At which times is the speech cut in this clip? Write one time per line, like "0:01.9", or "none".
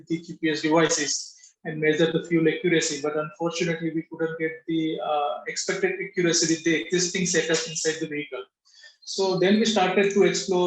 none